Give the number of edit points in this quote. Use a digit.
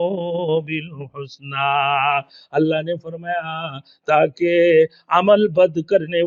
0